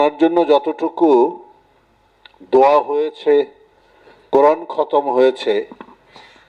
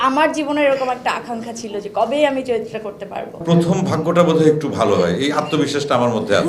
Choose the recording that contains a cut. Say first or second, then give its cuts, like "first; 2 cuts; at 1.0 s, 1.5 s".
second; 1 cut; at 3.4 s